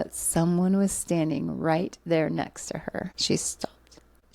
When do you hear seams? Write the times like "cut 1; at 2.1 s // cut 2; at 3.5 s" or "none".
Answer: cut 1; at 3.2 s